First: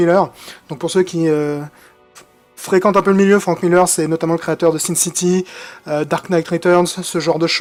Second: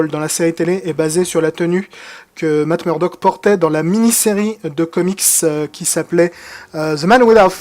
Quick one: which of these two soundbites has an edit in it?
second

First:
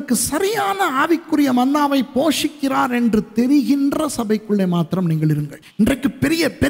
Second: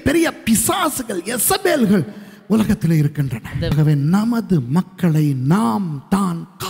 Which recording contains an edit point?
first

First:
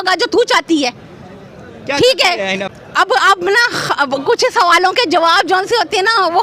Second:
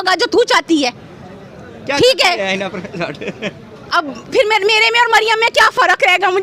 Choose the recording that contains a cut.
first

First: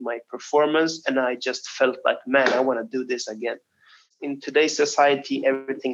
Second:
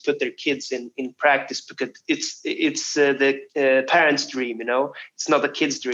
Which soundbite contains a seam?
first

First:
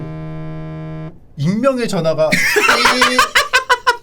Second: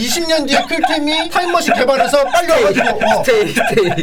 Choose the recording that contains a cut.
first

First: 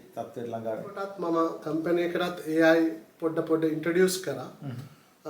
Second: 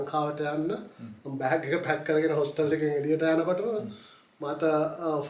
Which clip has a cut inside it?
first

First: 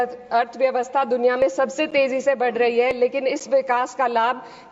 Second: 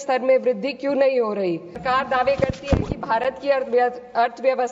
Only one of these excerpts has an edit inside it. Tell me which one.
second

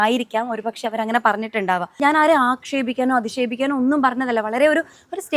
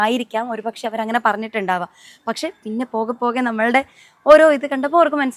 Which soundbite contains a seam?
first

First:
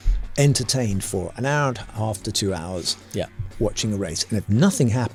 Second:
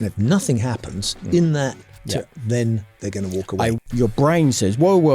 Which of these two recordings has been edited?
second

